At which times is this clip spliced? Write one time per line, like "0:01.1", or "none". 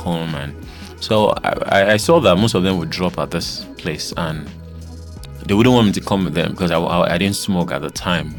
none